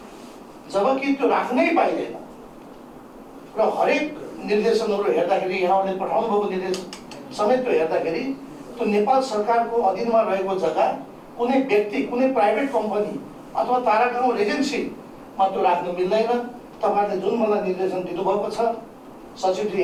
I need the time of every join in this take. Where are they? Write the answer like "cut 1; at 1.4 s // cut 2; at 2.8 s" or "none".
none